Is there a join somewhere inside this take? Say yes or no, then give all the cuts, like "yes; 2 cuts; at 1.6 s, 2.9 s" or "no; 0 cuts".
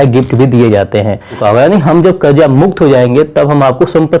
yes; 1 cut; at 1.4 s